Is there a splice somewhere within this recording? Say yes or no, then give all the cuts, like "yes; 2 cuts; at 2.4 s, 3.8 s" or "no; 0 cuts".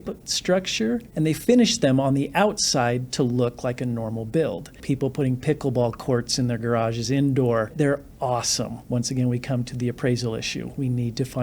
yes; 4 cuts; at 1.1 s, 4.8 s, 7.7 s, 8.8 s